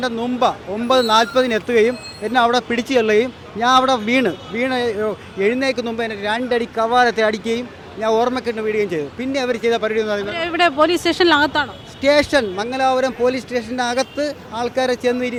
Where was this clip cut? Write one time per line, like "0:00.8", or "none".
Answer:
none